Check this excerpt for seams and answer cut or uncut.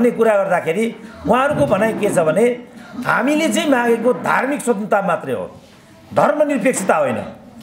uncut